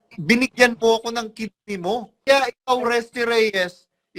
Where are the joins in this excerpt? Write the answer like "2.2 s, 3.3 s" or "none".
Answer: 2.3 s